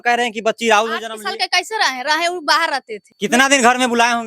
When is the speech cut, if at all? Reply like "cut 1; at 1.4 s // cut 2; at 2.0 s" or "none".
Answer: cut 1; at 3.0 s